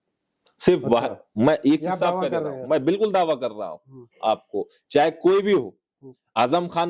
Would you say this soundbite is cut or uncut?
uncut